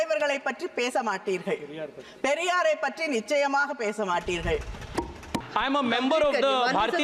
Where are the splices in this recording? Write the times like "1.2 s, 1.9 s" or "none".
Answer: 5.5 s